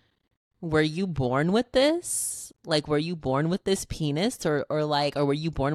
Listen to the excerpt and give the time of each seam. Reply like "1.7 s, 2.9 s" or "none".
none

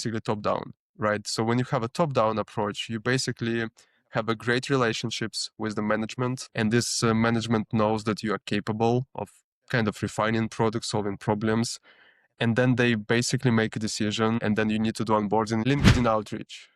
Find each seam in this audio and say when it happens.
6.4 s, 14.4 s, 15.6 s

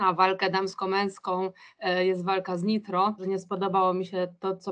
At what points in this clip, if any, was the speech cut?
3.2 s

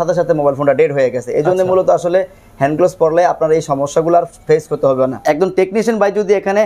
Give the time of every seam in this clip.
5.2 s

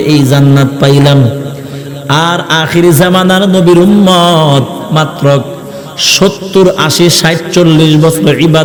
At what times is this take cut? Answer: none

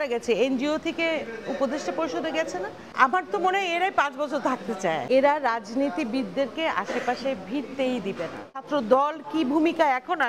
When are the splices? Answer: 2.8 s, 5.0 s, 8.6 s

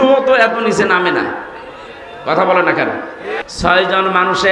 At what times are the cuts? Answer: 3.4 s

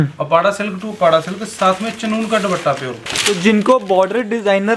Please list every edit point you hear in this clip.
3.1 s

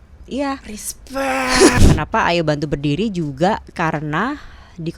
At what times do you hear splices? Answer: 1.7 s

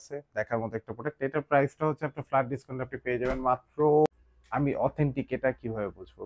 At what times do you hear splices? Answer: 4.1 s

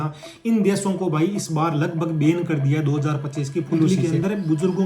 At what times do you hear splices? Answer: 3.9 s

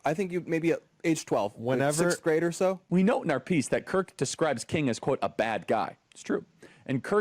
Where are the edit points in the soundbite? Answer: 2.8 s

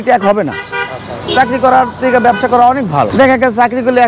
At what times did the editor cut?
1.2 s, 3.1 s

